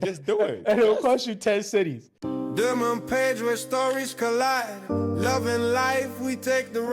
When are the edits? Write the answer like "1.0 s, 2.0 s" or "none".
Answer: 2.1 s